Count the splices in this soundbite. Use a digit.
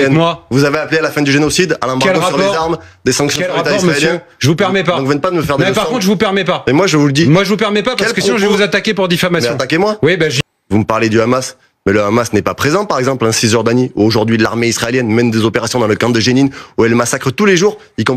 1